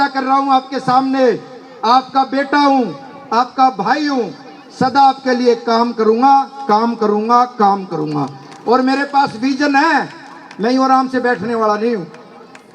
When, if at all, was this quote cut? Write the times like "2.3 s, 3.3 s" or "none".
none